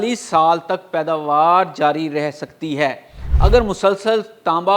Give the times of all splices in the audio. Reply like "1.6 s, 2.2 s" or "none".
3.2 s